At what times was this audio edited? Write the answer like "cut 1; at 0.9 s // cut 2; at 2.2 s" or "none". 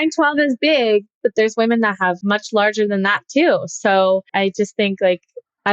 cut 1; at 1.2 s // cut 2; at 2.2 s